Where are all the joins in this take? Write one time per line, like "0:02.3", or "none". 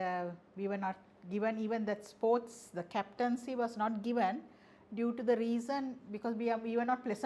none